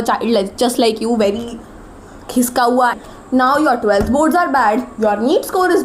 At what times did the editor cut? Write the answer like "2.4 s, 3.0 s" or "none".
3.0 s